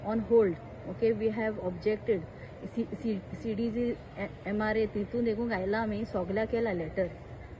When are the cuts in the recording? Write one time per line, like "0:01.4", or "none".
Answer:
none